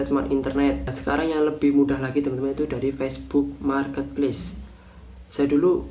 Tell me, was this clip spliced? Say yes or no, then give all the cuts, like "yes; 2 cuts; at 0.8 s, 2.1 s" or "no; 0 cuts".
yes; 1 cut; at 0.9 s